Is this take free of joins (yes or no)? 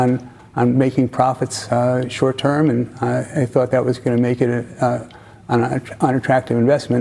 yes